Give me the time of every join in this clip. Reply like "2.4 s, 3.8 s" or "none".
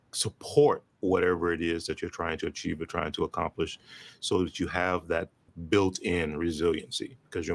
5.5 s